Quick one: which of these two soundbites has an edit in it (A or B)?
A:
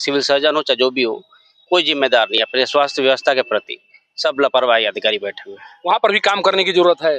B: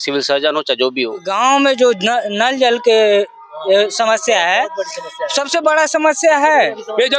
B